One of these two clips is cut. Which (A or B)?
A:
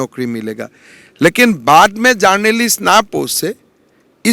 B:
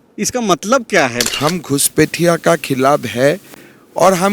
B